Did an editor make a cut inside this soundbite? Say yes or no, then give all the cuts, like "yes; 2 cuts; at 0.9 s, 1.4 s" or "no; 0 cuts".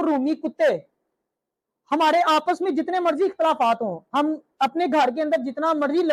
no; 0 cuts